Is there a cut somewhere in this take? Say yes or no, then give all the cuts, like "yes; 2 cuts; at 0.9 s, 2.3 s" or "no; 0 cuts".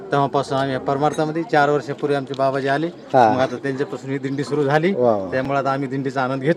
no; 0 cuts